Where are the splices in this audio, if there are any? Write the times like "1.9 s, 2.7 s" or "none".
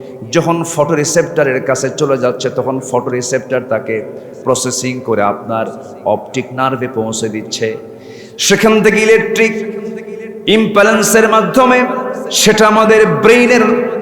12.2 s